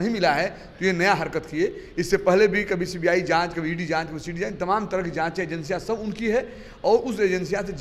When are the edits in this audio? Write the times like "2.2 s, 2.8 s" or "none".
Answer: none